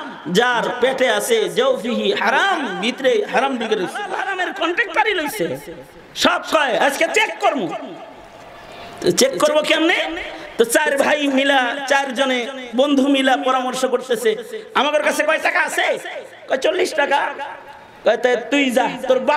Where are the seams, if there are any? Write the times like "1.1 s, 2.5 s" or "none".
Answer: 4.2 s